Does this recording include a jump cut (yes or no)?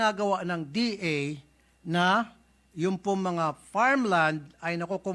no